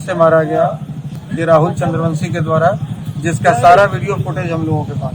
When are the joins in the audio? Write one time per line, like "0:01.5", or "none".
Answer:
0:01.1